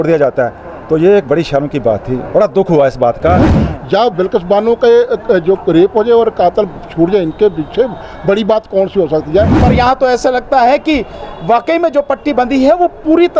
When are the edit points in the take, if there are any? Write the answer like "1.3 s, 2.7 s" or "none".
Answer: 3.5 s, 9.6 s